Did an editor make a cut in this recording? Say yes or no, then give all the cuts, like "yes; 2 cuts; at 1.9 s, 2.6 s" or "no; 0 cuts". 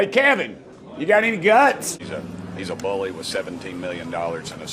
yes; 1 cut; at 2.0 s